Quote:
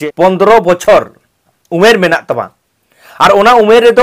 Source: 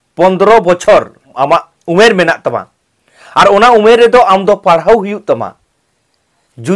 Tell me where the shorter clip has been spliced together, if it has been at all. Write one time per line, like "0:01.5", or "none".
0:01.4

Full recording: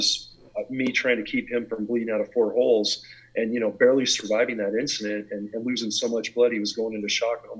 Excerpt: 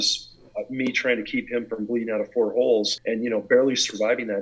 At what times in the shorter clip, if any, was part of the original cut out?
0:03.0

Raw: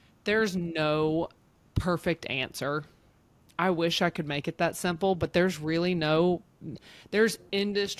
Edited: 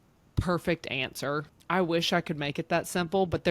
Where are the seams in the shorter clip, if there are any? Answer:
0:01.5

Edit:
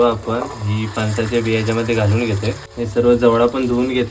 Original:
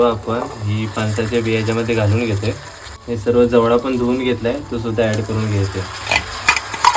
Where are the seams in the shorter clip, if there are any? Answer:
0:02.7

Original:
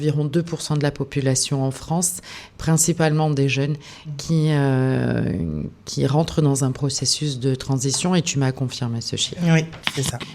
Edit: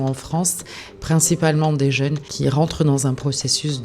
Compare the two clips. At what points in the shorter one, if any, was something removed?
0:02.3

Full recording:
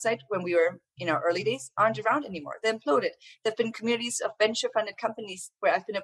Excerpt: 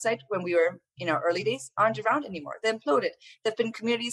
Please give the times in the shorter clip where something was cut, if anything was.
none

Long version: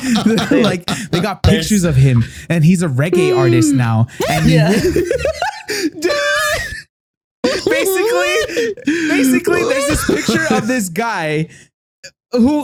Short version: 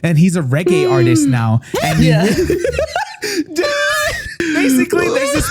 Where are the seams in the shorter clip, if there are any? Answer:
0:04.4

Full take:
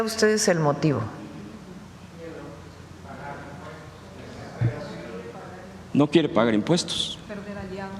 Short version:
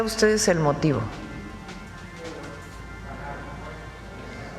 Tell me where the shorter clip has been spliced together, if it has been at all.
none

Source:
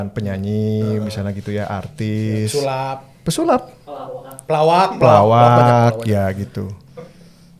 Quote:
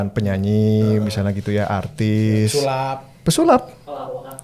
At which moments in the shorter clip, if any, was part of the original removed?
none

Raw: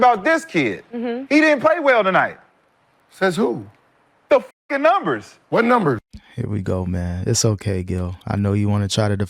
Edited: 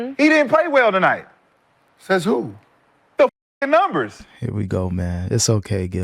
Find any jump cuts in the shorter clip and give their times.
0:04.2

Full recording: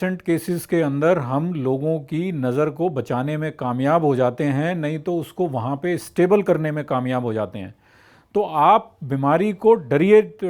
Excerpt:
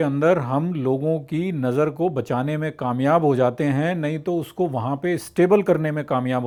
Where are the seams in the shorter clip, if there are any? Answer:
none

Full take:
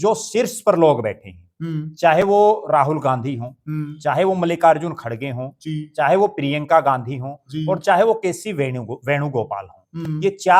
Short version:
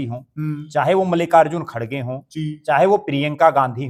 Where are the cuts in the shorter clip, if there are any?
none

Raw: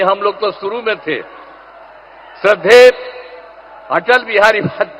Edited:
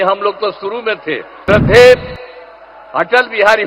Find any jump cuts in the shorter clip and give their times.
0:01.3

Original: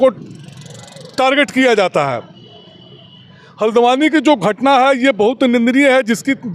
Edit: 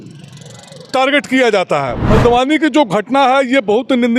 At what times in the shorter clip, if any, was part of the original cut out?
0:02.0

